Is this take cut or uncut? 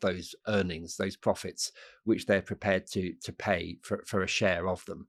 uncut